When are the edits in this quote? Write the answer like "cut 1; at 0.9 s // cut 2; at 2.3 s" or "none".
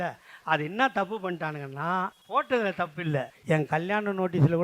cut 1; at 2.2 s // cut 2; at 3.3 s